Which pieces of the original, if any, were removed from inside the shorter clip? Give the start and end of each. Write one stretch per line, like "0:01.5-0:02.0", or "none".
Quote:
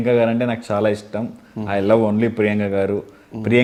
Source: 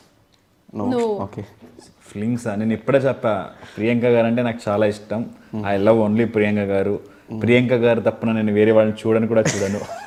none